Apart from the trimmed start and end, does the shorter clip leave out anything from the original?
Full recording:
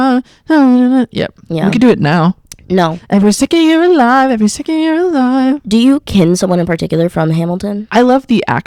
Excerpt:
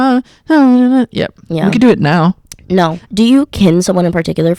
yes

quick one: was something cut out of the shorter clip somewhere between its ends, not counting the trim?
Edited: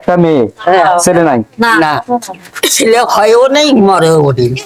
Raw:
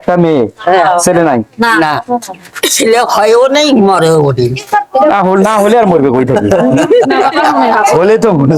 no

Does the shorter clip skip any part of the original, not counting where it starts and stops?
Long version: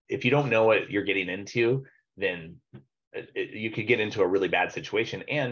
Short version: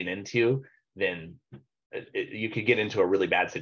no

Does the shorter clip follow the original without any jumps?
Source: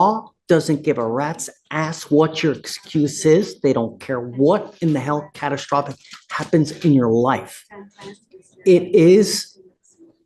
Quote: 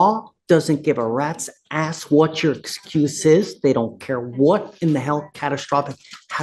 yes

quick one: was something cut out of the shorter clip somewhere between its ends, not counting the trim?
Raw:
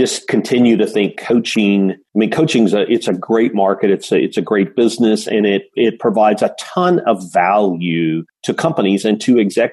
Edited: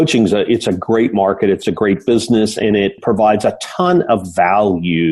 yes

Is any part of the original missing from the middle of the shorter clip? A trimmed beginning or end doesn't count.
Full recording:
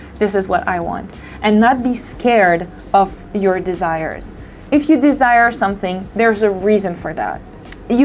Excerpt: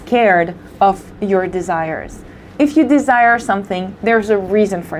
no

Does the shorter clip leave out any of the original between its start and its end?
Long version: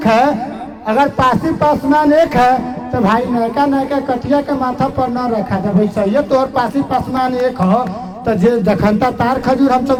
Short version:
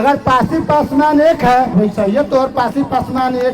yes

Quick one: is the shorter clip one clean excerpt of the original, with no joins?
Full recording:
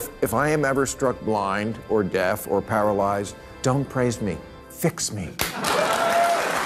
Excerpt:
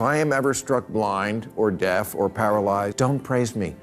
no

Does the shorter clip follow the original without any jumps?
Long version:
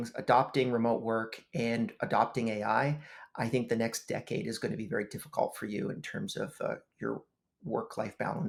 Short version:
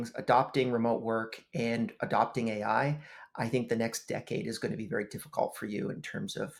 yes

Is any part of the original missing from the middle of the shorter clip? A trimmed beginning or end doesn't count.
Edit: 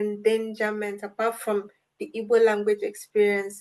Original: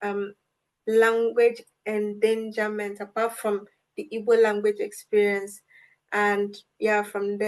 no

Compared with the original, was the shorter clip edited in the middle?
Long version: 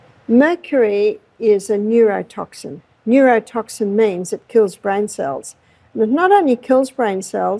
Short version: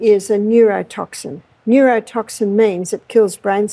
no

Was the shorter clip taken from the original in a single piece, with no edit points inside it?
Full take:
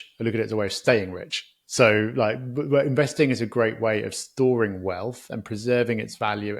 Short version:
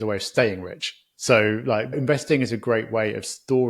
no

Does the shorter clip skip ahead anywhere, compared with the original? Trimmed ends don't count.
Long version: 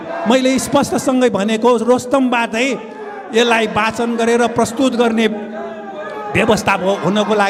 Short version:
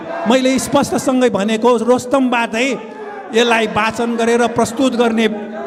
no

